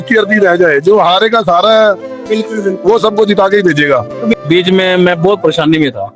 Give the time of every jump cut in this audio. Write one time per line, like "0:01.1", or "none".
0:04.4